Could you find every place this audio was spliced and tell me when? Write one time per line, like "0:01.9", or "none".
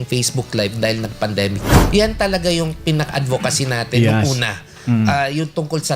0:01.8